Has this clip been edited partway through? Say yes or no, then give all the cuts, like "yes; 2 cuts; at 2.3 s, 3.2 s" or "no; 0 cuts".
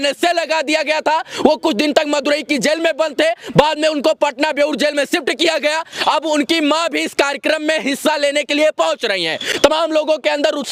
no; 0 cuts